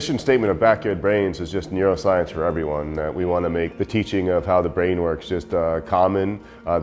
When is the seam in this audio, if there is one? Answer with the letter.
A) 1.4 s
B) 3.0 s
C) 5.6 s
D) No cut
D